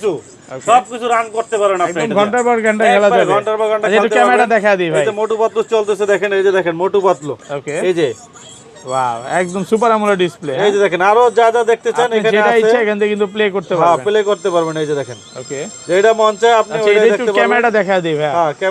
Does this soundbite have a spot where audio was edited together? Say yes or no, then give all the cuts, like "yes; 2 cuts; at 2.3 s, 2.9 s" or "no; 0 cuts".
no; 0 cuts